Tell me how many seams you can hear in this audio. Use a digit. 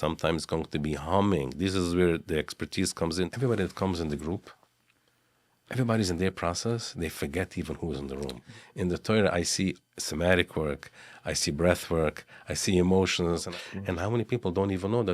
3